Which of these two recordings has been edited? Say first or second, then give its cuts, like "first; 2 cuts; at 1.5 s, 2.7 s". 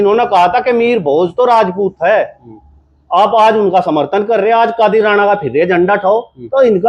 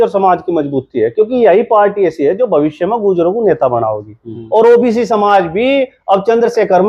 second; 1 cut; at 4.3 s